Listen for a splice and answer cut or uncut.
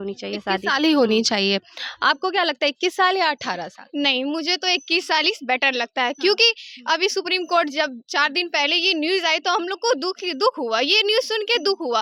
uncut